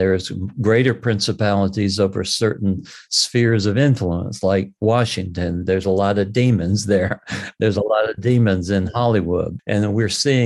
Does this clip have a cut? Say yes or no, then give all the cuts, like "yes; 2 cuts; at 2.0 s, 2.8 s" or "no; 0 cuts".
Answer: yes; 1 cut; at 9.5 s